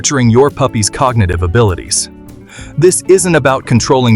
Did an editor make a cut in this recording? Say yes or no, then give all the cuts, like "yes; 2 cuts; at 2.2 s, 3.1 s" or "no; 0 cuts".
no; 0 cuts